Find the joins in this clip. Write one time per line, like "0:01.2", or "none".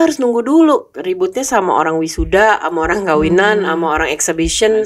none